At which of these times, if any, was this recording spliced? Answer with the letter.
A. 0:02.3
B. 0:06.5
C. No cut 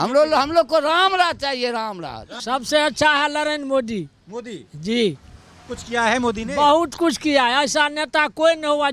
A